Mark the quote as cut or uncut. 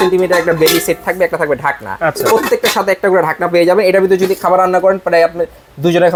uncut